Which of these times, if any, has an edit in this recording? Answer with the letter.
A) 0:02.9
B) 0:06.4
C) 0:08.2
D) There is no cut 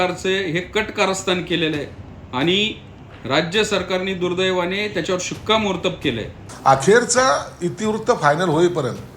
B